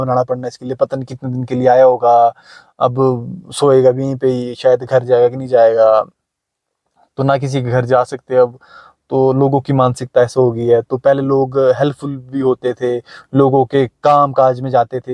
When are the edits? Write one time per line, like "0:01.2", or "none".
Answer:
none